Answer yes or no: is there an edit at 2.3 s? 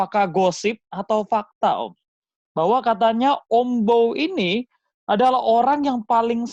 no